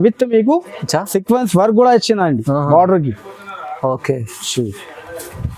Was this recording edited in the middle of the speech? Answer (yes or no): no